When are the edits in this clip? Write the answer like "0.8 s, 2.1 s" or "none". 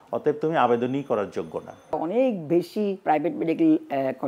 2.0 s, 3.0 s